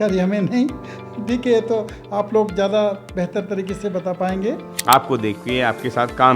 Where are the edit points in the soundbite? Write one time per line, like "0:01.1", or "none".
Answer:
0:04.7